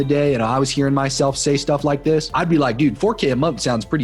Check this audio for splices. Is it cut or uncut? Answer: uncut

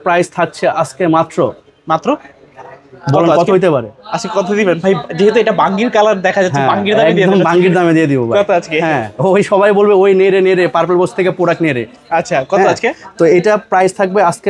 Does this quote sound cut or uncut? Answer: uncut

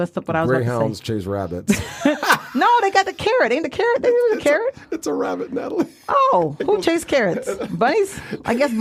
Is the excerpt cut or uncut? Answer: uncut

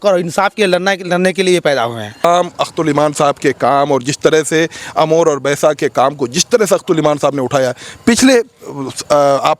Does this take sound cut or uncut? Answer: cut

